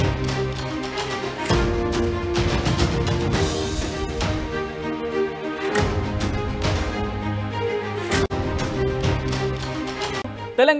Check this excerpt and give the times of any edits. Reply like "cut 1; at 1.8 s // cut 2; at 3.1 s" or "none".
cut 1; at 1.2 s